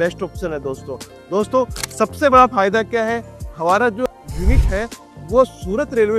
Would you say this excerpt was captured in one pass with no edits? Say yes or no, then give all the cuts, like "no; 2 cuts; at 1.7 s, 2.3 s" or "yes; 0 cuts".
no; 1 cut; at 4.1 s